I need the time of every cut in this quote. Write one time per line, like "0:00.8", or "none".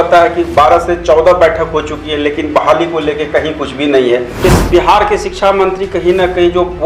0:04.4